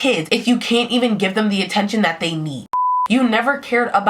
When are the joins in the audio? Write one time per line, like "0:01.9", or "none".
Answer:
0:02.8